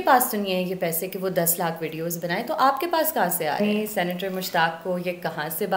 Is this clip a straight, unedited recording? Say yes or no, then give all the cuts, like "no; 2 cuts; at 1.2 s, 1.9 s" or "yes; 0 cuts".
no; 1 cut; at 3.6 s